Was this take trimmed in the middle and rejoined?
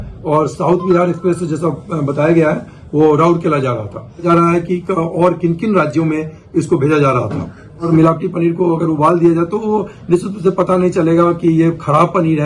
yes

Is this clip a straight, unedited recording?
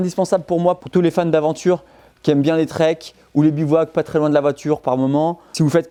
yes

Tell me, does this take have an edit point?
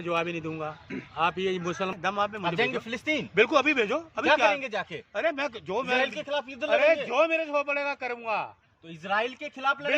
yes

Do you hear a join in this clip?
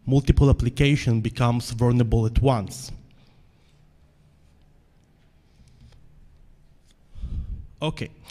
yes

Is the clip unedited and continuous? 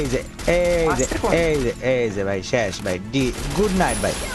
yes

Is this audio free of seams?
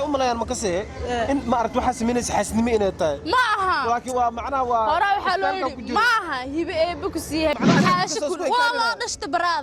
no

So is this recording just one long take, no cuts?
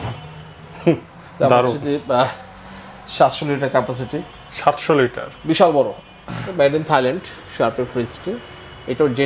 no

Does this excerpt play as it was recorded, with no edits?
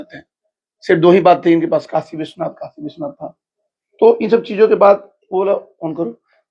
yes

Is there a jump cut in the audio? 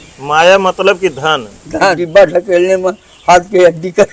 yes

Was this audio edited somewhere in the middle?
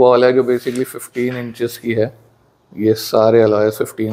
no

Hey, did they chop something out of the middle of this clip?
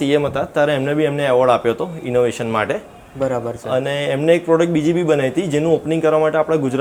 no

